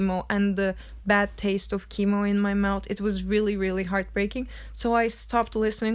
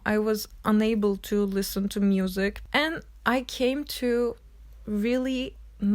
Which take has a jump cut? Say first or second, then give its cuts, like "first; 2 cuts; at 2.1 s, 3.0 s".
second; 1 cut; at 2.6 s